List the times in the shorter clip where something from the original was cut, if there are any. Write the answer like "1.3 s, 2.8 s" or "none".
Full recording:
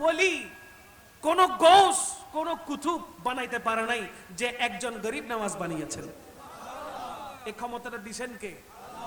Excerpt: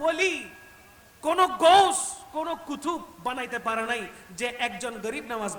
none